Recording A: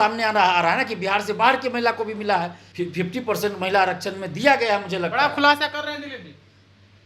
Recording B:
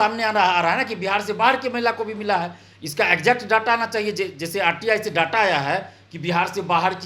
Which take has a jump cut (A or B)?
A